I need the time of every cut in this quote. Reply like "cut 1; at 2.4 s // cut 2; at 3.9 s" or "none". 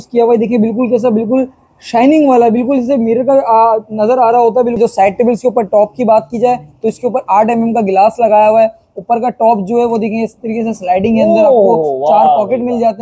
cut 1; at 4.8 s